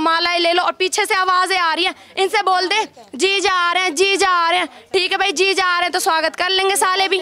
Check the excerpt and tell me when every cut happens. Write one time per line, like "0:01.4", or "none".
none